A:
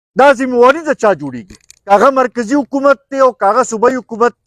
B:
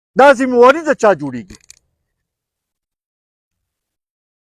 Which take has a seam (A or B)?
A